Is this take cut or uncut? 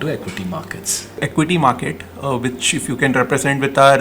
cut